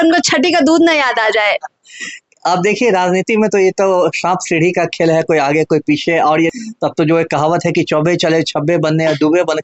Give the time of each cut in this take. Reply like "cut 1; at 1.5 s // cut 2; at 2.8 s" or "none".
cut 1; at 6.5 s

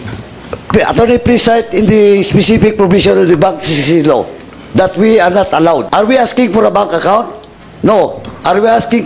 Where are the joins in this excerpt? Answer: cut 1; at 5.9 s

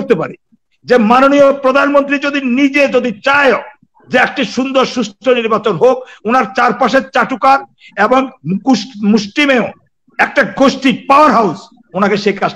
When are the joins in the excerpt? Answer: none

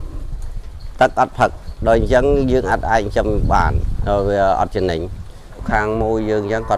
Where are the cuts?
cut 1; at 5.6 s

